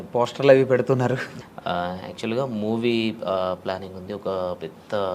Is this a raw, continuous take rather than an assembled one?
no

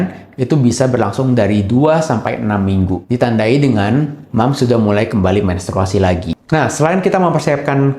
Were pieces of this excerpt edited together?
yes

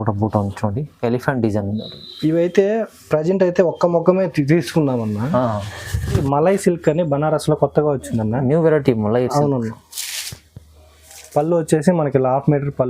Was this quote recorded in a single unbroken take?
no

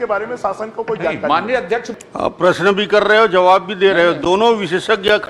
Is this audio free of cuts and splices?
no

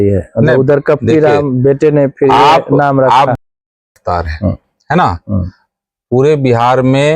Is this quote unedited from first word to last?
yes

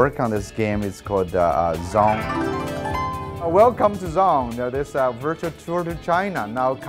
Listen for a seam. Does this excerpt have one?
no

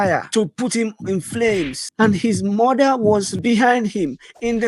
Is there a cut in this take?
yes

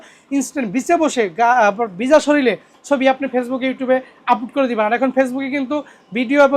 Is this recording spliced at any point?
no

